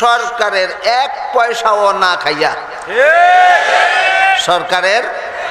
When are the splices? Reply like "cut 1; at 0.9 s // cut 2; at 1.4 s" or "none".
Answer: none